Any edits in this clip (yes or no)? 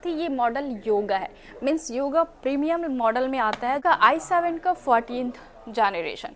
yes